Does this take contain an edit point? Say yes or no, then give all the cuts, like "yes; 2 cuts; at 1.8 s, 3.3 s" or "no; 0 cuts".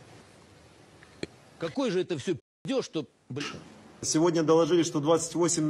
yes; 1 cut; at 4.0 s